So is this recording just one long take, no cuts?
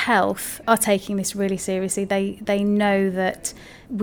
yes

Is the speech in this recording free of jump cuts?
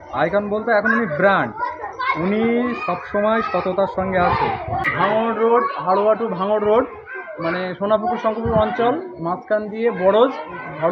no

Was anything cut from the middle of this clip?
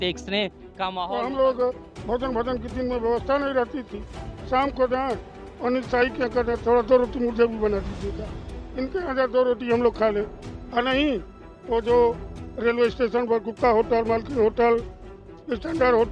yes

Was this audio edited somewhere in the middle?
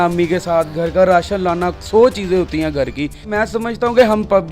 yes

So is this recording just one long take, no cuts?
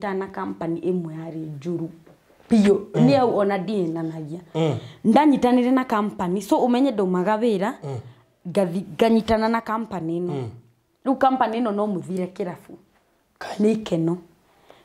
yes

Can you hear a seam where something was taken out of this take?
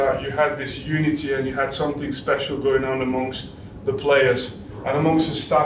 no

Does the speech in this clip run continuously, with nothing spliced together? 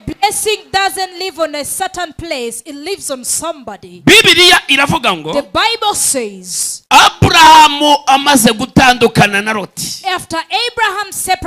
yes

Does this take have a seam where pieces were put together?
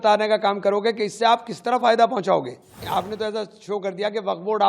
yes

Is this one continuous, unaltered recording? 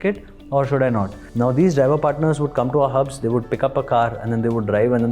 no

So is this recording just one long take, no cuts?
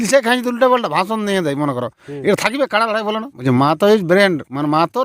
no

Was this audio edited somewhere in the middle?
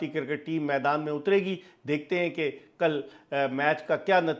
no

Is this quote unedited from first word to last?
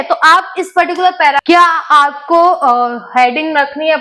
no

